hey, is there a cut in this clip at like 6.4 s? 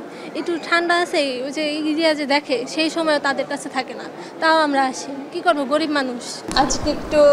yes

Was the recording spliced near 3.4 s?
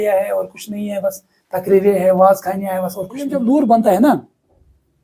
yes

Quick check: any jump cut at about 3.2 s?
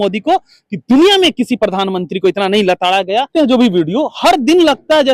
yes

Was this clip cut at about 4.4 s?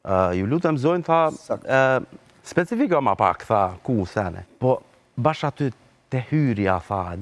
yes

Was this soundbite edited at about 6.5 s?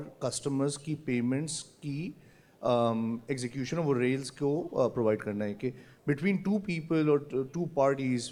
no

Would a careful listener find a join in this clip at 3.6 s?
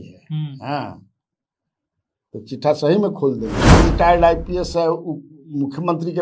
yes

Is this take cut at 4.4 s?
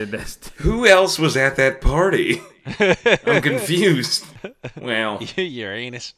yes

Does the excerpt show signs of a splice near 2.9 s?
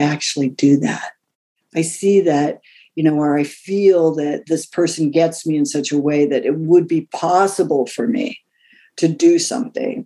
no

